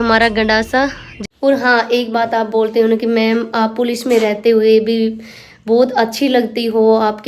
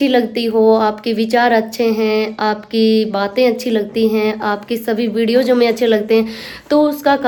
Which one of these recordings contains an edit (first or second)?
first